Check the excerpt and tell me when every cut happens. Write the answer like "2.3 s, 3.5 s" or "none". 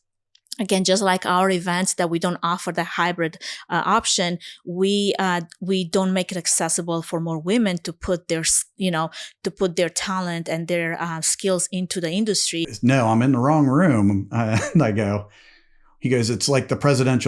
12.7 s